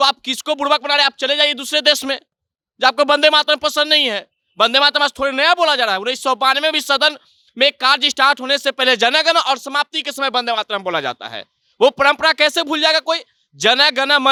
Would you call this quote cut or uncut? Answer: uncut